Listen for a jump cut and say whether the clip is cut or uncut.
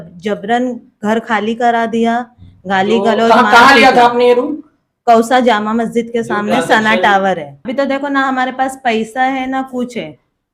cut